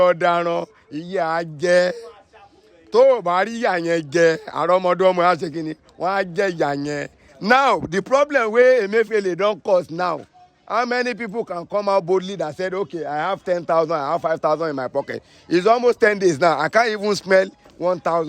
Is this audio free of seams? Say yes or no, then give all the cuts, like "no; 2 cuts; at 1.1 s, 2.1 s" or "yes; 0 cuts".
no; 1 cut; at 7.2 s